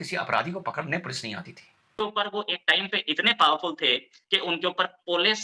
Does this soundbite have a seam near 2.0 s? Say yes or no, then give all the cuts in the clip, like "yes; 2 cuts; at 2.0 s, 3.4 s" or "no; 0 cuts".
yes; 1 cut; at 2.0 s